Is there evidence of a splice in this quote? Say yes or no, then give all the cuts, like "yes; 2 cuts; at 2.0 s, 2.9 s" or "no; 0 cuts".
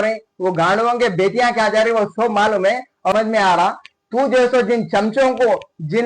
yes; 1 cut; at 3.1 s